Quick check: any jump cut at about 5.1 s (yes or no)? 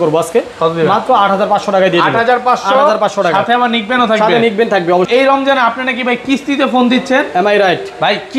yes